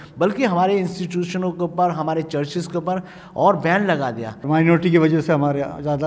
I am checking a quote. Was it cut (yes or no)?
yes